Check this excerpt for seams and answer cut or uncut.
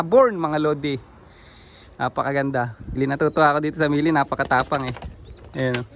cut